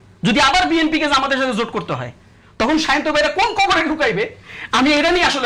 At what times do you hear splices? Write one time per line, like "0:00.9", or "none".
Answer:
none